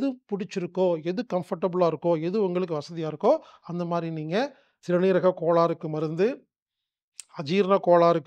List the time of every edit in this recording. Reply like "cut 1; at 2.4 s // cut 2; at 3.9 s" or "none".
cut 1; at 4.7 s